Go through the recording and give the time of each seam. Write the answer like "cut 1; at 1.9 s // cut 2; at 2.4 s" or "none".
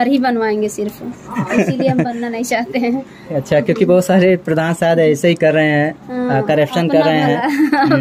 none